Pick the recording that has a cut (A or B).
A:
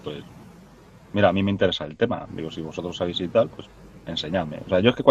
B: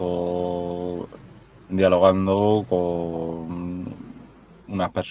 B